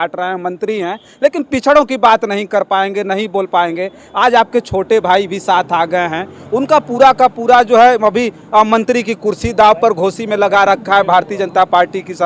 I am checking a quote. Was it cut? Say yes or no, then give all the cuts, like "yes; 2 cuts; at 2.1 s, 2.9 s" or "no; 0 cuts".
no; 0 cuts